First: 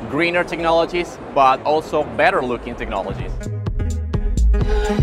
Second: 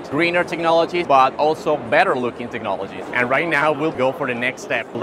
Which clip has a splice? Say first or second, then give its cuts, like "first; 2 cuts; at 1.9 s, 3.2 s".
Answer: second; 2 cuts; at 1.0 s, 3.0 s